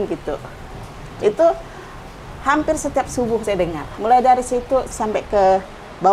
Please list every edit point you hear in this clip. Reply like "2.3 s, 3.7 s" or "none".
3.9 s, 5.0 s